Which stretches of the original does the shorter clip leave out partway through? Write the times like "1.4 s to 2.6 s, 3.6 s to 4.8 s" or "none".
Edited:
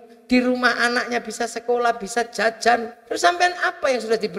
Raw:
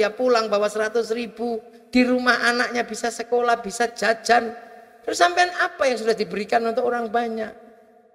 4.6 s to 5.0 s